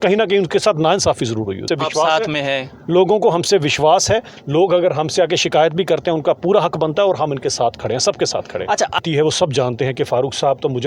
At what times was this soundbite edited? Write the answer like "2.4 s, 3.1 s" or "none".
1.6 s, 8.9 s